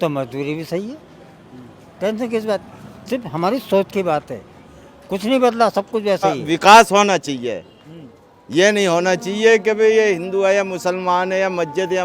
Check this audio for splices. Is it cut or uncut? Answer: cut